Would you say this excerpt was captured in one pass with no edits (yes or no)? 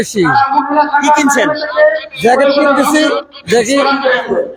yes